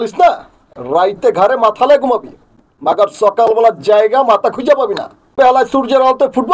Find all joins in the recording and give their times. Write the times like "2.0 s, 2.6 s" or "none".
5.3 s